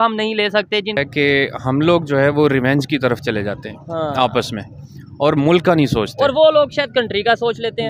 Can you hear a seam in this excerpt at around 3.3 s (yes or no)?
no